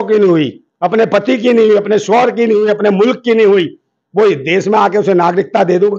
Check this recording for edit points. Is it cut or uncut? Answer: uncut